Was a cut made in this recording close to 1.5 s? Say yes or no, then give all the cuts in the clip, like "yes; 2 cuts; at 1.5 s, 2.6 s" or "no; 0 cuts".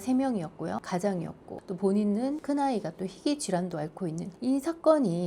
yes; 4 cuts; at 0.8 s, 1.5 s, 2.4 s, 4.3 s